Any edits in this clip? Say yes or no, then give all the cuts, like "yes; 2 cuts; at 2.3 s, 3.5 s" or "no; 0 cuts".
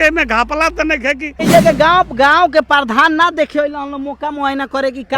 yes; 1 cut; at 1.5 s